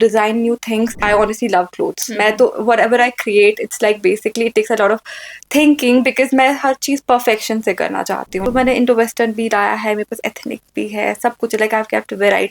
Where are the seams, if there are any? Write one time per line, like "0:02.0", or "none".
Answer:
0:01.0
0:08.4